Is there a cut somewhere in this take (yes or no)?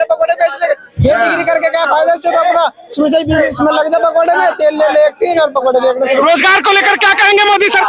no